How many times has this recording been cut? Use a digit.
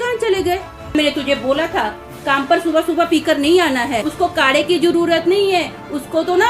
2